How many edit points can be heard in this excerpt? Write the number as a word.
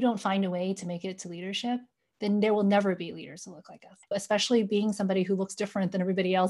one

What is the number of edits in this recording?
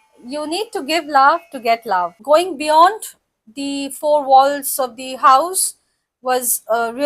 one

